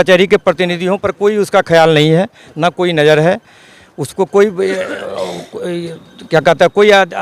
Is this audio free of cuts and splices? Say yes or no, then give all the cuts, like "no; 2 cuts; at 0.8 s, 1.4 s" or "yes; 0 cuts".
yes; 0 cuts